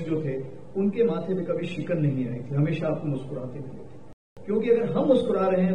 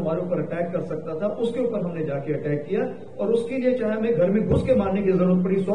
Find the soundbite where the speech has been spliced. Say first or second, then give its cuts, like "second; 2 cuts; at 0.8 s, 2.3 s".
first; 1 cut; at 4.3 s